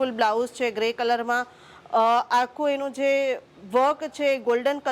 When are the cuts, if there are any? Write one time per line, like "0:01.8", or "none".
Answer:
none